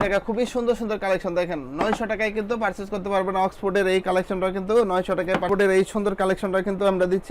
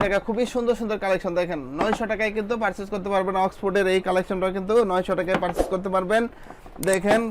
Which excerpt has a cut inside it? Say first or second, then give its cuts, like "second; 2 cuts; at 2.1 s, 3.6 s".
first; 1 cut; at 5.4 s